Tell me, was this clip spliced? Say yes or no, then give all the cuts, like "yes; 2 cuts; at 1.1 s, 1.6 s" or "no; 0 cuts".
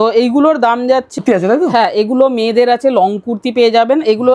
yes; 1 cut; at 1.1 s